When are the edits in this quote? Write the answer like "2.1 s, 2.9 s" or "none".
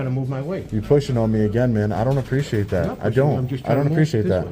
none